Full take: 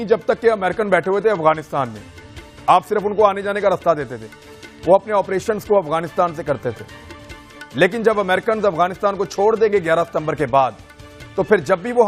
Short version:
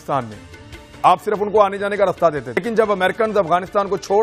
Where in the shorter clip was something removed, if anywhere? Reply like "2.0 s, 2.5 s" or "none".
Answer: 2.6 s